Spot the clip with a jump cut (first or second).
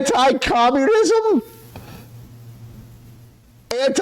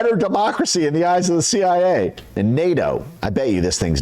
second